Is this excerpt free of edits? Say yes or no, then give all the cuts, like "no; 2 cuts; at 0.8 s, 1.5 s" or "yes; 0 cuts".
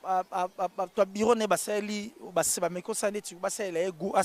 yes; 0 cuts